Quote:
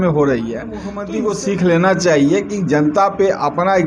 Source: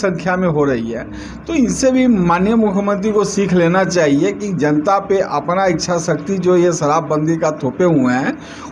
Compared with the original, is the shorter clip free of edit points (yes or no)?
no